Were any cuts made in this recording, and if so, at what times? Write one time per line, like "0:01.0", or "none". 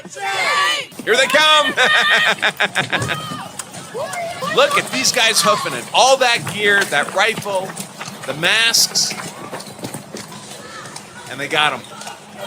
0:00.9
0:04.4
0:10.3